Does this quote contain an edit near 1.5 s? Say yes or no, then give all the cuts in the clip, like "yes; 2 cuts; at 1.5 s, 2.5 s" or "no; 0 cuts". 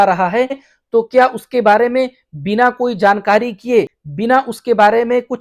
no; 1 cut; at 4.0 s